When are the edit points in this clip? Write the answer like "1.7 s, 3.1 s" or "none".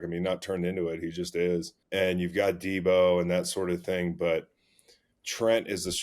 1.8 s